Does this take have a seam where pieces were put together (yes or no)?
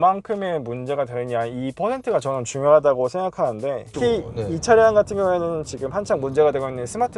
yes